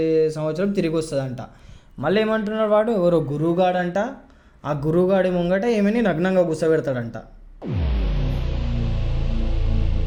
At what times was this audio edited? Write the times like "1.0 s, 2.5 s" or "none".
none